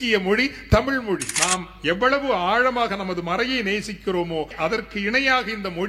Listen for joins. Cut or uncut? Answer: cut